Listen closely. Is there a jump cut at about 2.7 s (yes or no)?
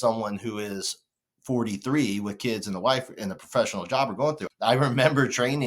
no